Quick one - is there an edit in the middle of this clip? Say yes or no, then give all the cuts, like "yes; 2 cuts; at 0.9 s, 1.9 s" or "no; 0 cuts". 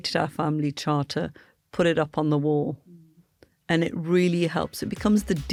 no; 0 cuts